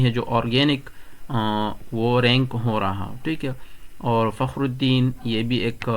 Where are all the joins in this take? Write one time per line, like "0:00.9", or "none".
none